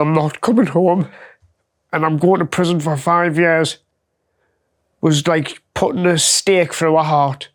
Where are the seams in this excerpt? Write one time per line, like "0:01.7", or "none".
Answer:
none